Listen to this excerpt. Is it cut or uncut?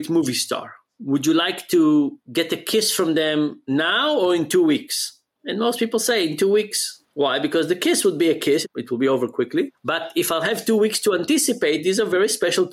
uncut